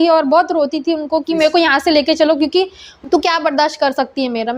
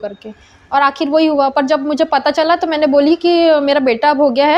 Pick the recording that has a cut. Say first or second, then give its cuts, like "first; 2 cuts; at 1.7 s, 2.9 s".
first; 1 cut; at 2.9 s